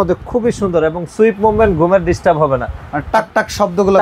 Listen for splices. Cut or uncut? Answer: uncut